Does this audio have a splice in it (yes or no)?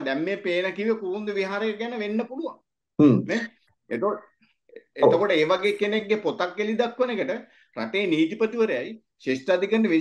no